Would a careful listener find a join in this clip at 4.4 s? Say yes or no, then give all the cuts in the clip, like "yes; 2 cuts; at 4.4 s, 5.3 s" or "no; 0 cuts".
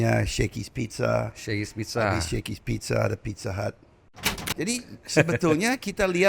yes; 1 cut; at 4.4 s